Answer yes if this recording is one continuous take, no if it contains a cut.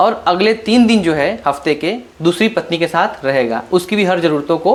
yes